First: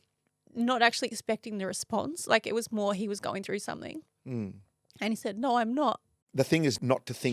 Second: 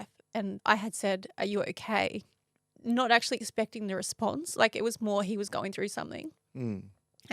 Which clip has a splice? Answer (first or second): first